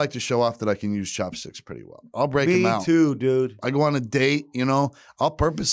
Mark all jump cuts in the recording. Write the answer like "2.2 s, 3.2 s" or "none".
none